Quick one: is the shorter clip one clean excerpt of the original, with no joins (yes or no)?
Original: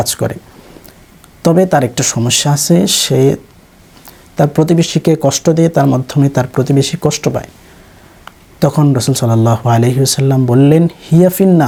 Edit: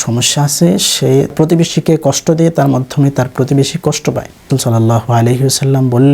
no